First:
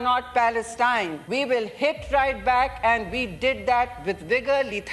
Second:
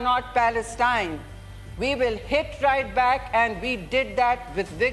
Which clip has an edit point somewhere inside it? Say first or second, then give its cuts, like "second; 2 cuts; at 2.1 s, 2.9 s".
first; 1 cut; at 1.2 s